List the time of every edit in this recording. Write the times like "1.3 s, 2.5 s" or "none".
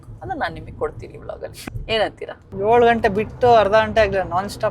1.6 s, 2.4 s

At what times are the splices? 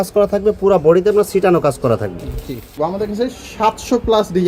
2.8 s

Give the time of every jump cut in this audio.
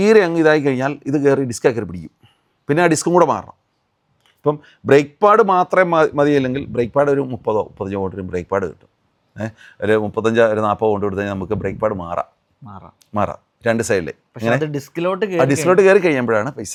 none

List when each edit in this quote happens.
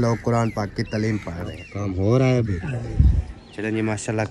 1.7 s

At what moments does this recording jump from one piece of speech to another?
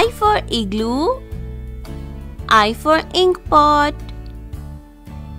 3.9 s

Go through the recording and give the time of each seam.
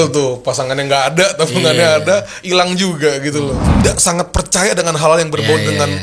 3.8 s

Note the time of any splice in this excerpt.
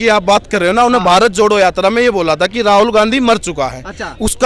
none

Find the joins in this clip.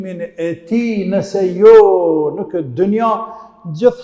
none

